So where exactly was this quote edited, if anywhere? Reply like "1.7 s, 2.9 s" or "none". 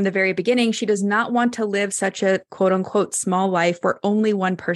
none